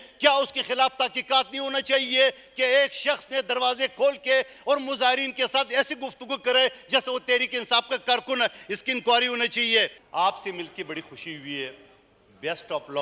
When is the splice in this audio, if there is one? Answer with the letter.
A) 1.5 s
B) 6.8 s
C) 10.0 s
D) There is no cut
C